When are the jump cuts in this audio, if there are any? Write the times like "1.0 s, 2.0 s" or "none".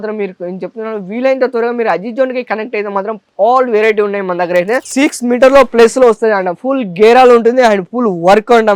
4.9 s

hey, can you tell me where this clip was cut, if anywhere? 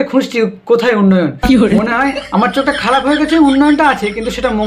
none

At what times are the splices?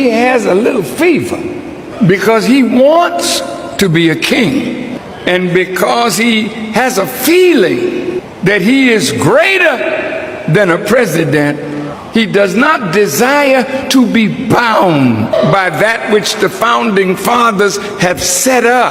none

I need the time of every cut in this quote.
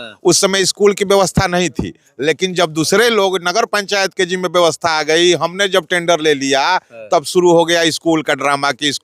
none

